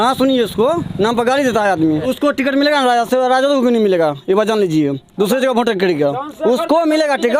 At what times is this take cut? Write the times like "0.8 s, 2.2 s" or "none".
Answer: 2.0 s

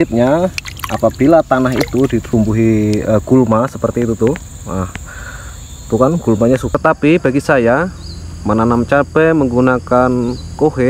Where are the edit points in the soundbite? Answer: 2.2 s, 6.7 s

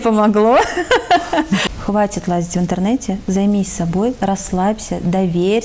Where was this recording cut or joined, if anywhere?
1.6 s

